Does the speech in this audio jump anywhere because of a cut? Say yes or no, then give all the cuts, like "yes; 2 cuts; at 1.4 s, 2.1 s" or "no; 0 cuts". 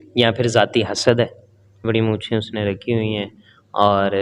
yes; 1 cut; at 1.8 s